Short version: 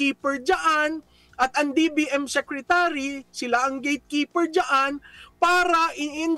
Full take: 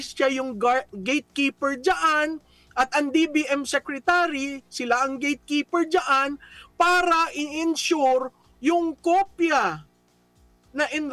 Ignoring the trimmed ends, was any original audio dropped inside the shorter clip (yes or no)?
no